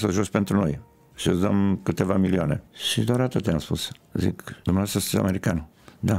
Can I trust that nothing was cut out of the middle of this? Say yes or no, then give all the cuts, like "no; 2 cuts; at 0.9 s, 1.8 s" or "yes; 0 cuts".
no; 2 cuts; at 2.8 s, 4.5 s